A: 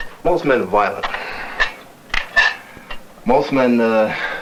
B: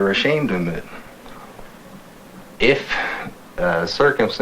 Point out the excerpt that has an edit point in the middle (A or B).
B